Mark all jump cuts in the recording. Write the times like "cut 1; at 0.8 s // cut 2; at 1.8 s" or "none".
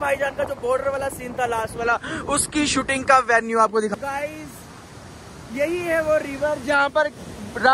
cut 1; at 3.9 s

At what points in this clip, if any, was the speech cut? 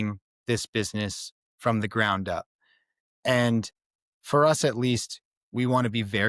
none

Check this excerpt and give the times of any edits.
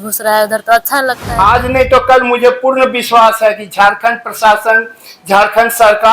cut 1; at 1.2 s

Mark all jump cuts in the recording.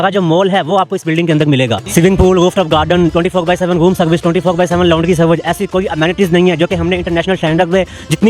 cut 1; at 1.8 s

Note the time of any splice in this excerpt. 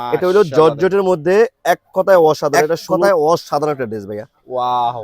cut 1; at 2.9 s

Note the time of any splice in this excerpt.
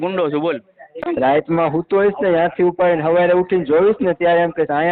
cut 1; at 1.0 s

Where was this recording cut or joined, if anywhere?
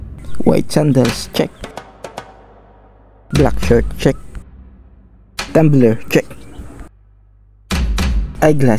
none

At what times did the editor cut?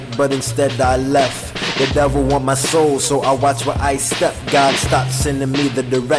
none

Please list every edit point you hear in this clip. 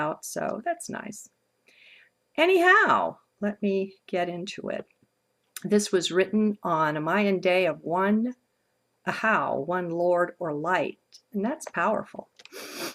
cut 1; at 11.9 s

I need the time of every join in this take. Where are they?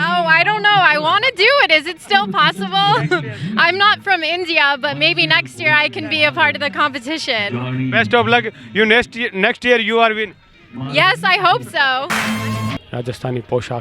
cut 1; at 12.5 s

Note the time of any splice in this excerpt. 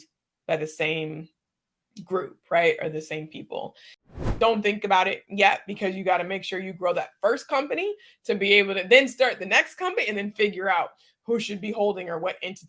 cut 1; at 4.1 s

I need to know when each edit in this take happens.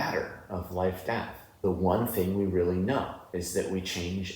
cut 1; at 1.6 s // cut 2; at 3.2 s

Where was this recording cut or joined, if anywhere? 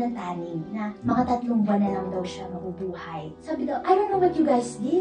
cut 1; at 3.4 s

